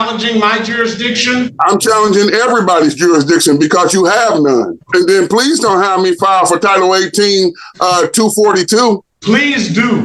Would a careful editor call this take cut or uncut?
cut